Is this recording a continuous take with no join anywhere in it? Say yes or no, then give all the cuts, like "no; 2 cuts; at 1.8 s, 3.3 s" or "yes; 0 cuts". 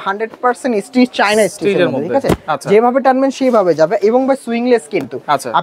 yes; 0 cuts